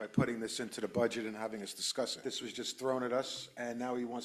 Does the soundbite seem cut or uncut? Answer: cut